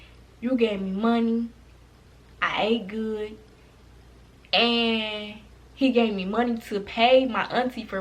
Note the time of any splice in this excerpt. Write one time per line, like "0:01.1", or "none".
none